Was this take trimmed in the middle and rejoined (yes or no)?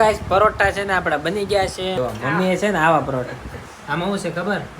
yes